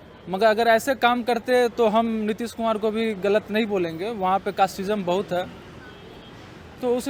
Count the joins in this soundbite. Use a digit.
0